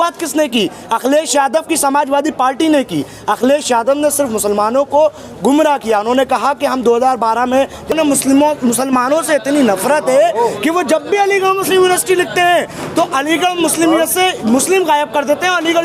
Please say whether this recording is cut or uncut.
cut